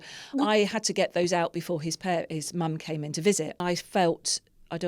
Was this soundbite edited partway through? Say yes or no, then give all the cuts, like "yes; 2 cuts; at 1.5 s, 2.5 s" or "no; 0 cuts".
yes; 1 cut; at 3.6 s